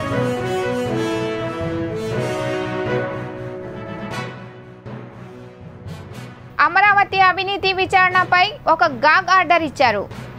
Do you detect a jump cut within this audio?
no; 0 cuts

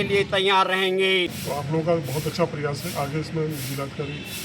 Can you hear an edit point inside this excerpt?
yes; 1 cut; at 1.4 s

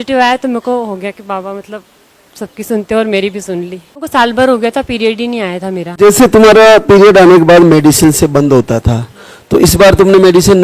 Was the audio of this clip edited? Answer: yes; 2 cuts; at 4.1 s, 6.0 s

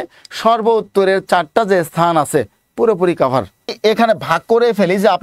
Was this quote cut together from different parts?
yes; 1 cut; at 3.7 s

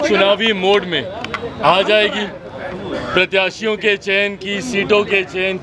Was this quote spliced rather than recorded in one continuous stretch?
no; 0 cuts

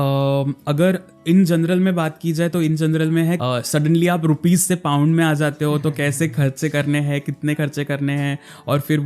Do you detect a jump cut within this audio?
yes; 1 cut; at 3.4 s

